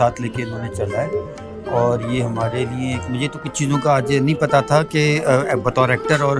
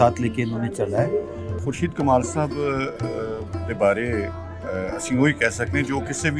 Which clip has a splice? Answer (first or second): second